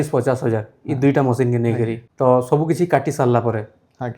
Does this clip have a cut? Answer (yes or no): yes